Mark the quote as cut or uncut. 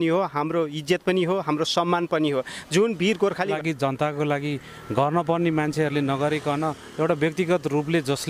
cut